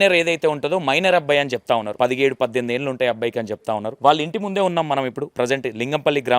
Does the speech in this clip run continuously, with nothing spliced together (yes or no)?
no